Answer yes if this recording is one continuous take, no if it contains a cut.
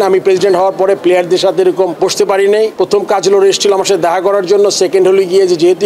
no